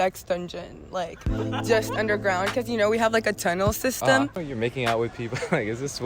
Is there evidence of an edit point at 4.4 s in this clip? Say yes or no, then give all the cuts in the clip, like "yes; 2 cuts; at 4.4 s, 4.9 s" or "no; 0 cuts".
yes; 1 cut; at 4.4 s